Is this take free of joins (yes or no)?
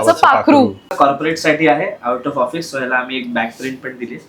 no